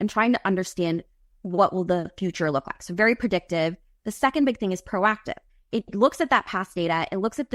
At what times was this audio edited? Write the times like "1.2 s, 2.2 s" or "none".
none